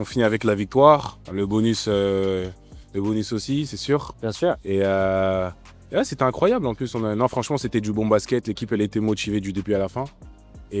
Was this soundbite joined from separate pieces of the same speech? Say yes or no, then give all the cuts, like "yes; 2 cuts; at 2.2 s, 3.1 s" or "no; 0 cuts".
no; 0 cuts